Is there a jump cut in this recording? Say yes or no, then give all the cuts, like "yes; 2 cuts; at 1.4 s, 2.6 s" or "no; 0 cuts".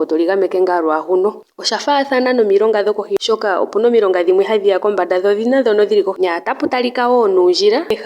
yes; 2 cuts; at 1.5 s, 6.1 s